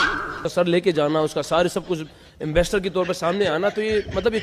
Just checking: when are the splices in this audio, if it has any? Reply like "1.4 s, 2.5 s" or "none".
none